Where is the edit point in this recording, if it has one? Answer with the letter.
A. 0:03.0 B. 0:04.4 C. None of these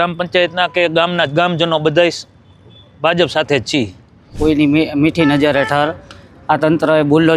B